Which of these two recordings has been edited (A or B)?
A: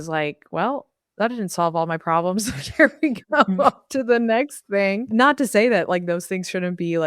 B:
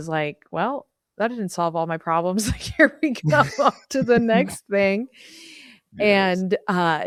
A